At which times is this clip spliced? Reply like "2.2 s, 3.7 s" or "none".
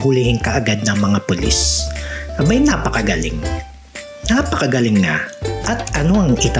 5.6 s